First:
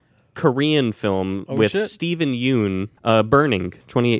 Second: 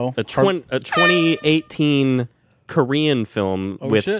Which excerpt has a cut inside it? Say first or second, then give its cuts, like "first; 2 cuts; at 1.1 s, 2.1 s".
first; 1 cut; at 2.9 s